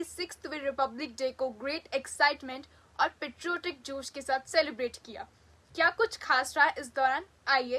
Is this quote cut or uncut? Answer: uncut